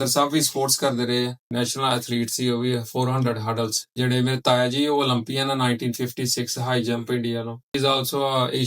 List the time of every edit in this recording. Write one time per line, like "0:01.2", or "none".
0:01.4
0:03.8
0:07.6